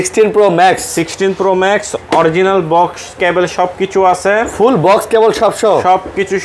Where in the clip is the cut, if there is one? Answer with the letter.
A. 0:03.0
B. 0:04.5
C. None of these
C